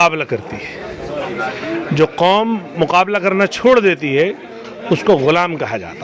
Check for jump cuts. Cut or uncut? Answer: uncut